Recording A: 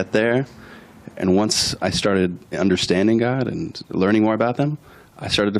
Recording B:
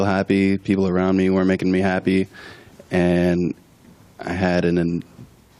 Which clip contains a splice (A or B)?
B